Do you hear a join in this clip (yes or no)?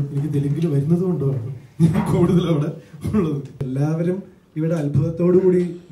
yes